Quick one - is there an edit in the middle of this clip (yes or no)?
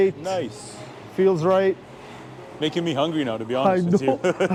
no